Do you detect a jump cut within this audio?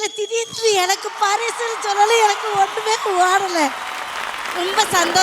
no; 0 cuts

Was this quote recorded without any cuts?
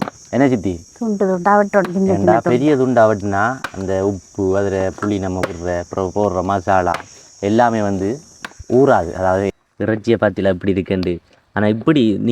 no; 1 cut; at 9.5 s

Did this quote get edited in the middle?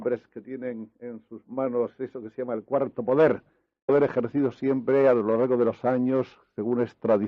no; 0 cuts

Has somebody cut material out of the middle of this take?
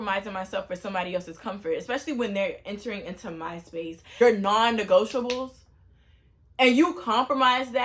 yes; 1 cut; at 4.2 s

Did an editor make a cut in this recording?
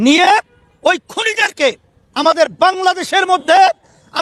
no; 0 cuts

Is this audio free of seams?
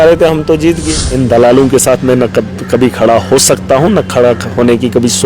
no; 1 cut; at 1.0 s

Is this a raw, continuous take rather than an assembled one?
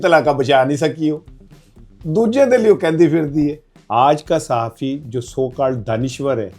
no; 1 cut; at 3.7 s

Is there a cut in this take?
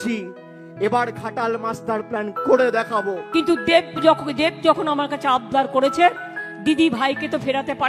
yes; 1 cut; at 3.2 s

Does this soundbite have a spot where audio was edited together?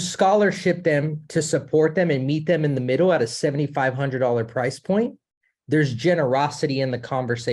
no; 0 cuts

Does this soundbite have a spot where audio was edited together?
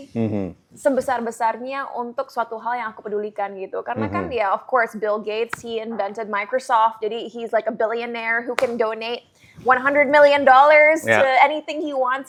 no; 0 cuts

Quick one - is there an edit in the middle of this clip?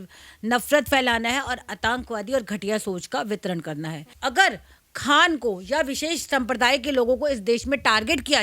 yes; 1 cut; at 4.1 s

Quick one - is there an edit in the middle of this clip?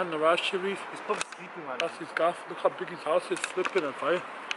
no; 0 cuts

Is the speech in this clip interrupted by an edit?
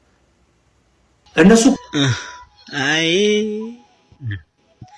yes; 1 cut; at 1.8 s

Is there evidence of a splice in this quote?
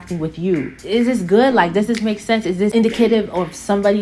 yes; 1 cut; at 2.7 s

